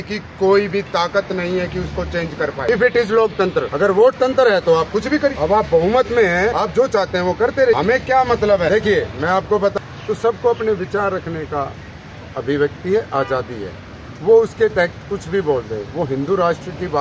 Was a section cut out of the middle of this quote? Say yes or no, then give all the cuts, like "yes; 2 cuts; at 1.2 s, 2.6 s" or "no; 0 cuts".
yes; 7 cuts; at 2.7 s, 3.7 s, 5.3 s, 6.5 s, 7.8 s, 8.7 s, 9.8 s